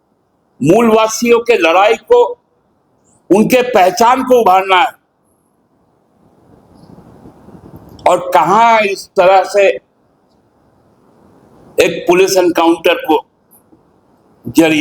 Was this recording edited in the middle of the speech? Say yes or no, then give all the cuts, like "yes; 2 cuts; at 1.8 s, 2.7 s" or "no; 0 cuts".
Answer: no; 0 cuts